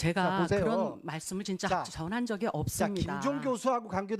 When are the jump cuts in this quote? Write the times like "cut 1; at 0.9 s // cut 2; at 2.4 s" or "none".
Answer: none